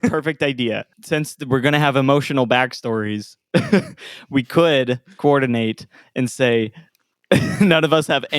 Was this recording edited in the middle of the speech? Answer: yes; 1 cut; at 0.9 s

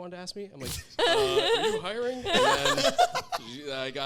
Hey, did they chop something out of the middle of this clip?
no; 0 cuts

